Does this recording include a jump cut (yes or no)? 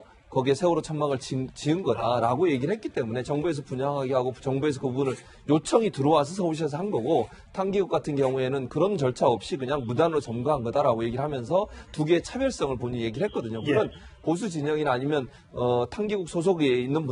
no